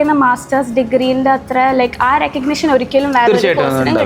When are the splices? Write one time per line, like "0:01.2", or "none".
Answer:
none